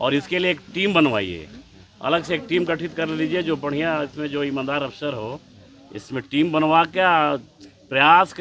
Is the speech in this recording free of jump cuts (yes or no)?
yes